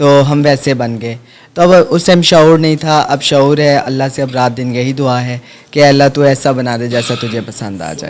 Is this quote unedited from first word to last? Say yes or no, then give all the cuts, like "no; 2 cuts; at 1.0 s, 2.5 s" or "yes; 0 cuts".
yes; 0 cuts